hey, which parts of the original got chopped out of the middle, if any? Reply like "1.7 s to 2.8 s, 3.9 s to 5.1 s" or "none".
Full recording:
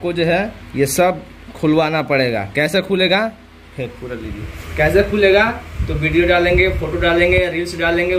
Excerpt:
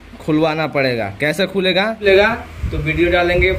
3.4 s to 5.2 s